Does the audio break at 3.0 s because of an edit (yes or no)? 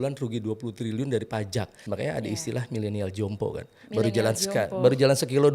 no